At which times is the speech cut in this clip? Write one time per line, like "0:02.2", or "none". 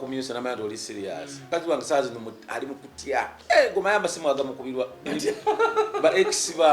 0:01.4
0:03.4